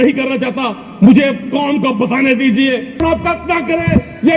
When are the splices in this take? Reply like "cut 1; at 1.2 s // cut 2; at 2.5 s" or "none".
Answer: cut 1; at 3.0 s